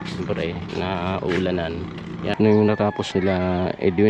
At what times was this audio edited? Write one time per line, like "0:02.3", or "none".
0:02.3